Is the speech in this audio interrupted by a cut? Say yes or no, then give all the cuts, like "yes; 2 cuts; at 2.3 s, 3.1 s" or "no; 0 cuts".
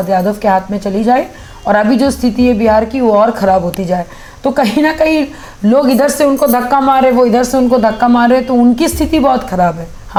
no; 0 cuts